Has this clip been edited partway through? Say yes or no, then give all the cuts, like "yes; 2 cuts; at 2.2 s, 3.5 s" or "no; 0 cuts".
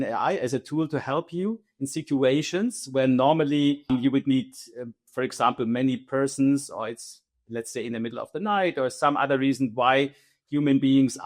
yes; 1 cut; at 3.9 s